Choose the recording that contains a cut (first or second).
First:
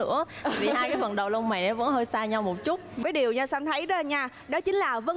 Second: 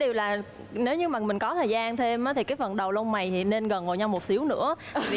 first